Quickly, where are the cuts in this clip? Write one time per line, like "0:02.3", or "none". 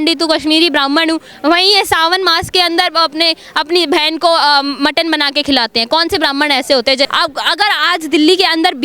0:07.1